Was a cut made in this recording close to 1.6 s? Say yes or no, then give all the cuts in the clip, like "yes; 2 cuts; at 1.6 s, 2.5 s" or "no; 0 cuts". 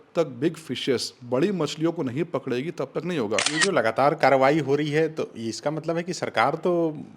no; 1 cut; at 3.5 s